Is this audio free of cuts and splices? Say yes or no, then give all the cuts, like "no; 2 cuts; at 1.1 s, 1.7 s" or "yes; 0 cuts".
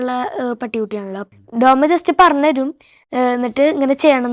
no; 1 cut; at 1.2 s